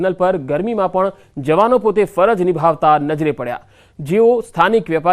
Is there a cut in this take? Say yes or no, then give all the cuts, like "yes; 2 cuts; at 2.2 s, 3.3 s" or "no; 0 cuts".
yes; 1 cut; at 0.9 s